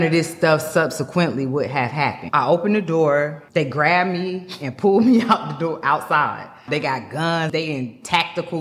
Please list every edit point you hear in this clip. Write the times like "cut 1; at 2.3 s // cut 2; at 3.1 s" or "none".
cut 1; at 2.2 s // cut 2; at 3.4 s // cut 3; at 6.6 s // cut 4; at 7.5 s

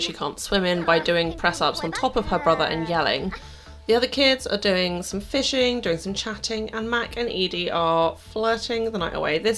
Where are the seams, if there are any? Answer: none

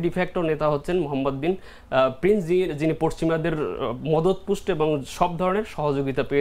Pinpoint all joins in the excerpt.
none

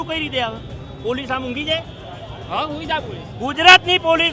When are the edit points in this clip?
none

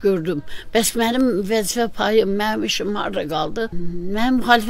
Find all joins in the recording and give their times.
cut 1; at 3.7 s

